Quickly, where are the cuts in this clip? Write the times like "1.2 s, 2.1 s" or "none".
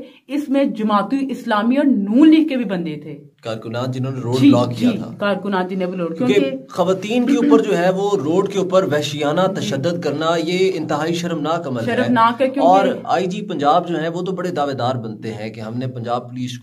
none